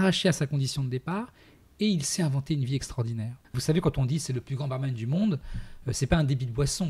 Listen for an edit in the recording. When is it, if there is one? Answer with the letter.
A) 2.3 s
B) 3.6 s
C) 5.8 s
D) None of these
B